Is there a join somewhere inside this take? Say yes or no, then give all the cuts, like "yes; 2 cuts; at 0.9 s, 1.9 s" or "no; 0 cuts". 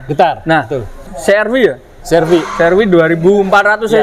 yes; 1 cut; at 1.0 s